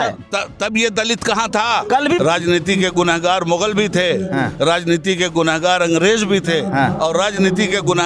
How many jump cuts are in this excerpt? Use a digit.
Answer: 1